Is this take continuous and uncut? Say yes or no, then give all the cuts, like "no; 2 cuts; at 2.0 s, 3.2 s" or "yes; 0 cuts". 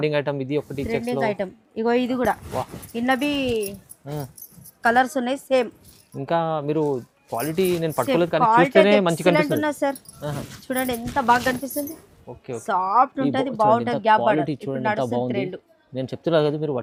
yes; 0 cuts